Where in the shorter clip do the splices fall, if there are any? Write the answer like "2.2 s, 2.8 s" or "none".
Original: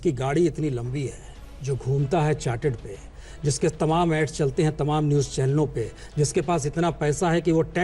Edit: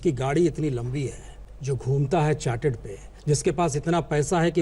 3.1 s